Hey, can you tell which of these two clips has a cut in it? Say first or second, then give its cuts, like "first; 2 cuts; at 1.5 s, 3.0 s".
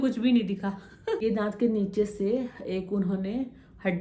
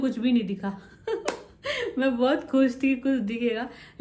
first; 1 cut; at 1.2 s